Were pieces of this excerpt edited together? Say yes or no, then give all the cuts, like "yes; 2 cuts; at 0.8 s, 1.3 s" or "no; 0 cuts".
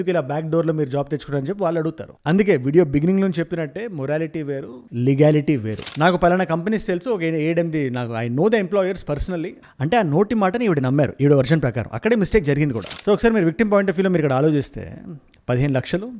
yes; 2 cuts; at 5.8 s, 12.9 s